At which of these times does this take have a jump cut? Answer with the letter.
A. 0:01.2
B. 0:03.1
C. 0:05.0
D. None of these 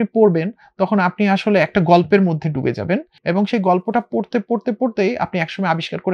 B